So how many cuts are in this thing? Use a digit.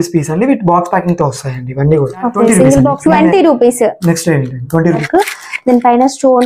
2